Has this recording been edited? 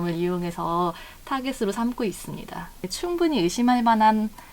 yes; 1 cut; at 2.8 s

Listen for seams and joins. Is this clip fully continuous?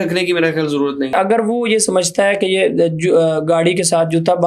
no; 1 cut; at 1.1 s

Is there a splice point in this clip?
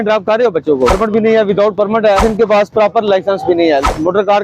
yes; 2 cuts; at 0.9 s, 2.2 s

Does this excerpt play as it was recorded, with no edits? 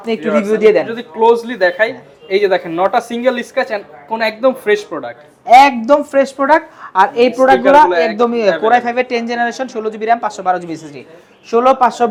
yes; 0 cuts

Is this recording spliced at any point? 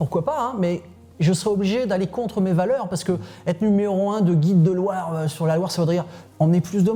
no; 0 cuts

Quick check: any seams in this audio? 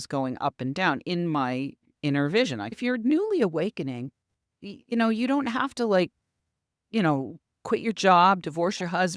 yes; 1 cut; at 2.8 s

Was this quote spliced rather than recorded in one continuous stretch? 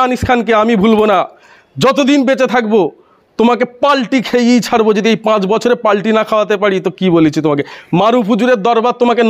no; 0 cuts

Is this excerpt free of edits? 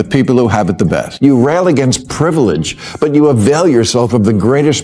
no; 1 cut; at 1.2 s

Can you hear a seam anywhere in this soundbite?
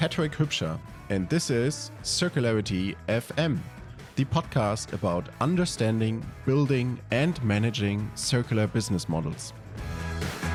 no; 0 cuts

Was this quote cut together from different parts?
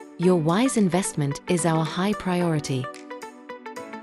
yes; 1 cut; at 2.8 s

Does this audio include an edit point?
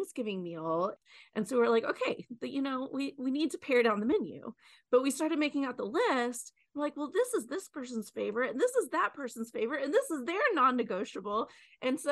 yes; 1 cut; at 0.9 s

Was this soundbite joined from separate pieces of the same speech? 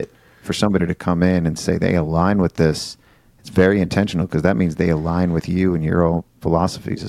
no; 0 cuts

